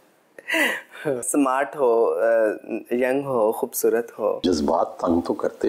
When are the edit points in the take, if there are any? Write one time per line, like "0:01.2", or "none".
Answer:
0:01.2
0:04.4